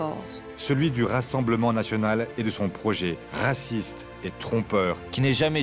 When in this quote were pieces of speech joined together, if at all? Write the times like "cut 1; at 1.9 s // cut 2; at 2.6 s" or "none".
cut 1; at 3.3 s